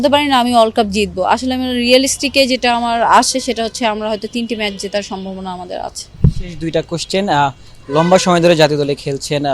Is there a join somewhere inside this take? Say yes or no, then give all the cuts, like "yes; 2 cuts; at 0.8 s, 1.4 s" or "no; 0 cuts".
no; 0 cuts